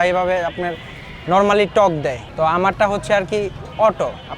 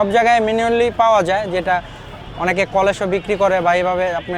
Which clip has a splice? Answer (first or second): first